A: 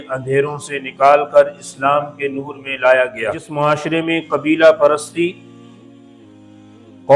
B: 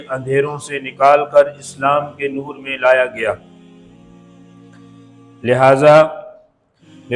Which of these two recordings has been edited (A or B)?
A